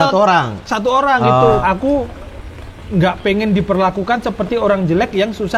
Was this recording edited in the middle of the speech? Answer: yes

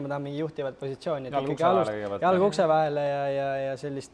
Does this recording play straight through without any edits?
yes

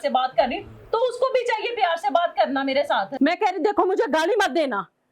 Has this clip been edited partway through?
yes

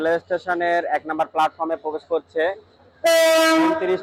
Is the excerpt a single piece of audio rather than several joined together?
yes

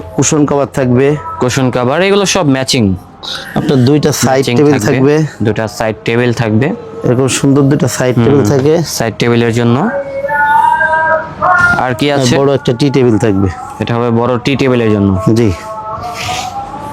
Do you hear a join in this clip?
no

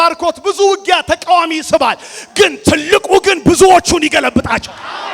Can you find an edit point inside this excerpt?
no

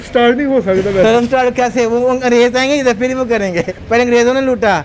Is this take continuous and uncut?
no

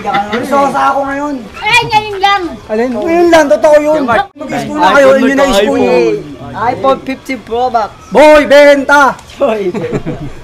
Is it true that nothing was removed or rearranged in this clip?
no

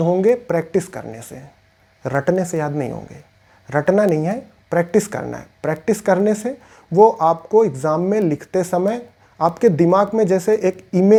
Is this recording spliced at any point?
no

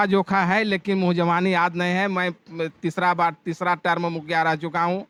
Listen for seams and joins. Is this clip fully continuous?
yes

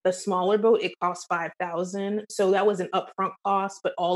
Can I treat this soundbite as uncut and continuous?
yes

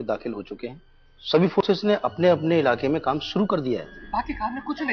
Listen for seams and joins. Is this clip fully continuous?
no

